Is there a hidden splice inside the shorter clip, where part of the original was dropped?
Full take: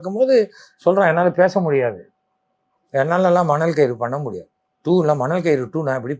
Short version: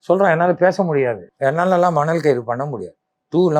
yes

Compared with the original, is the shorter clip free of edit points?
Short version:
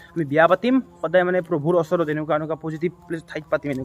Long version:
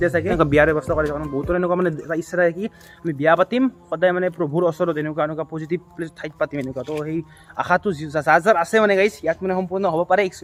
yes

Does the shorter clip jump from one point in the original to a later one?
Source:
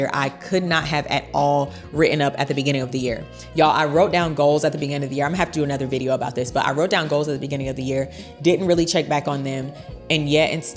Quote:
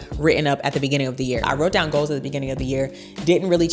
yes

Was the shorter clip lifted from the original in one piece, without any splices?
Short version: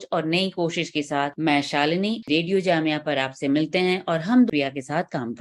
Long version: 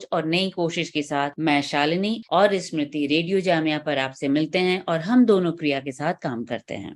no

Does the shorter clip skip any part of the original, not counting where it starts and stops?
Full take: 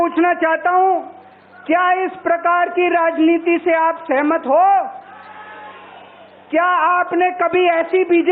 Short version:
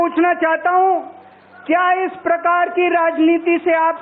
no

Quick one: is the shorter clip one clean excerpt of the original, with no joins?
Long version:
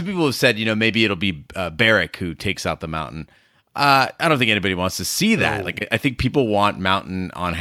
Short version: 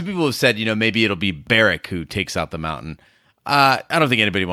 no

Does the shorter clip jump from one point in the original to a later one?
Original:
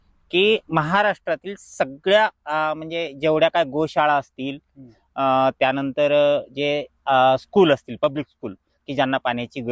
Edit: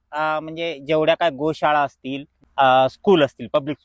yes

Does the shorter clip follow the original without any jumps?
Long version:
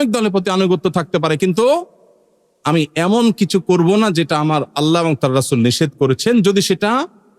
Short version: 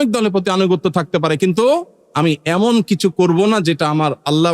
no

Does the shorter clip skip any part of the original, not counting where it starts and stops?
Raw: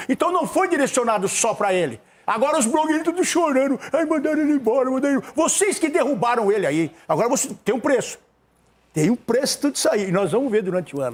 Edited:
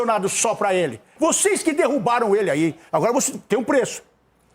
yes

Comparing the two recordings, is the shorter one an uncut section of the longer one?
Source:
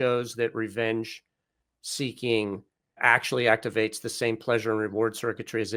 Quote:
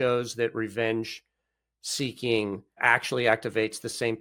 no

